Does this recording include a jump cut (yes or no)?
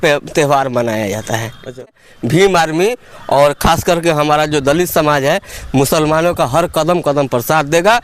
yes